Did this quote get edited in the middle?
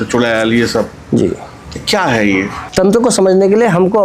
yes; 1 cut; at 2.6 s

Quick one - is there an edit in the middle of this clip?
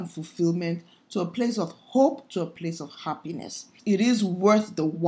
yes; 1 cut; at 3.7 s

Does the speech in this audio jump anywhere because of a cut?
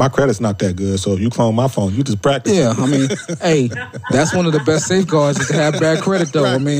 no; 0 cuts

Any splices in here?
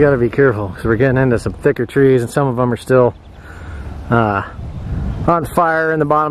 no; 0 cuts

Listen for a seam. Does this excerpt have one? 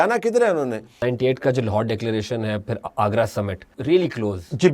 yes; 2 cuts; at 0.9 s, 3.7 s

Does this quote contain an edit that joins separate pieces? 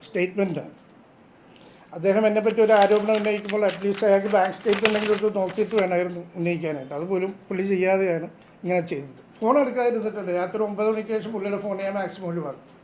yes; 1 cut; at 9.3 s

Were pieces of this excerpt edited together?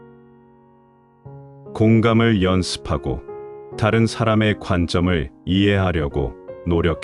yes; 1 cut; at 1.7 s

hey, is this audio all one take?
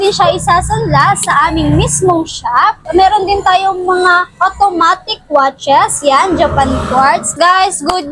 no; 2 cuts; at 2.8 s, 7.3 s

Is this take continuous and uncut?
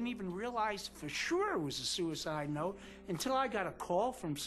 yes; 0 cuts

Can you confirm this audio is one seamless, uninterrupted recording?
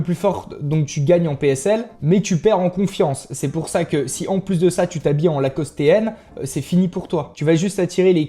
no; 1 cut; at 7.3 s

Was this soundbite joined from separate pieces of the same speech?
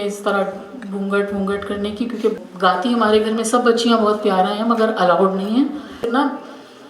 yes; 2 cuts; at 2.4 s, 6.0 s

